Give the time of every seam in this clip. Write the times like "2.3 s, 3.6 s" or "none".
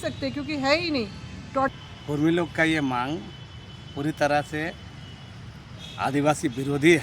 1.7 s

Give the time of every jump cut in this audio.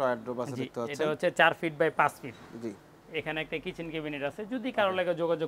none

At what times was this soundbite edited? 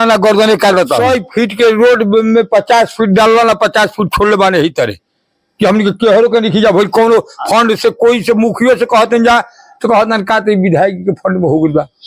1.0 s

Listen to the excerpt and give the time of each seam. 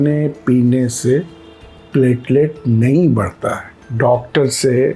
3.8 s

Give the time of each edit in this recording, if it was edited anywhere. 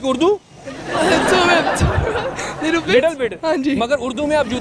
none

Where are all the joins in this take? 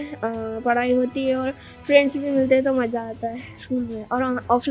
none

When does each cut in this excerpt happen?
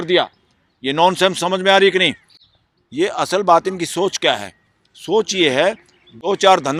none

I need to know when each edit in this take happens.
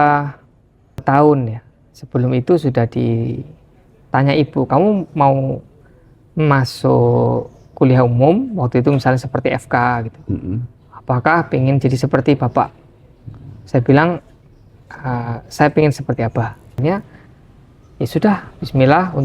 1.0 s, 16.8 s

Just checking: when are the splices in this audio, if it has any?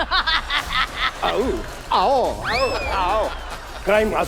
none

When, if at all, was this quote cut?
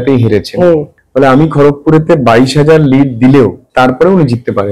1.0 s, 3.6 s

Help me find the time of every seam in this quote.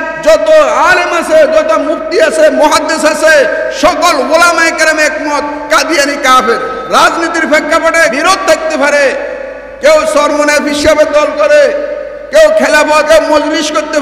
6.8 s, 8.2 s, 13.1 s

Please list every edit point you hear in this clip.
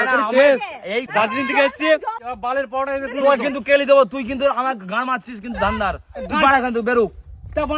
1.1 s, 2.3 s

